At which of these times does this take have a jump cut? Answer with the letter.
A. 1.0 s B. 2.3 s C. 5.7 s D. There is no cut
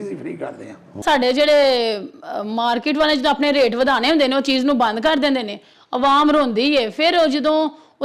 A